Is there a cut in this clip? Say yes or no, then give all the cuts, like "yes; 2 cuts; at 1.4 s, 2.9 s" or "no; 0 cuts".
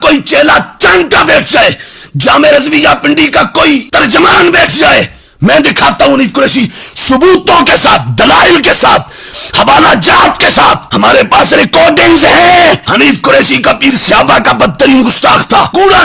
no; 0 cuts